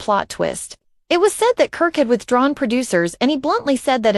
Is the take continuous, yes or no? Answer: yes